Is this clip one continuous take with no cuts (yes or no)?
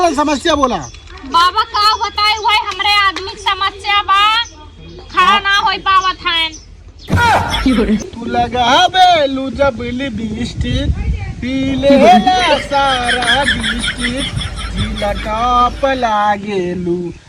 no